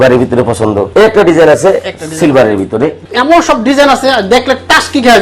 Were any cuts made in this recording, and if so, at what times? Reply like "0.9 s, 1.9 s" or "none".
0.9 s, 3.0 s